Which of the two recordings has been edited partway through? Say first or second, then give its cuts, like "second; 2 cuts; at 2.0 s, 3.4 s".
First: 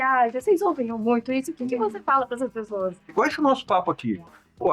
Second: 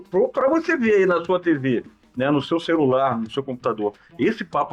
first; 1 cut; at 3.1 s